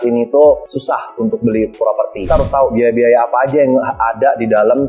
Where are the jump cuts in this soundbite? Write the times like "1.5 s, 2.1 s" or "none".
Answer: 2.2 s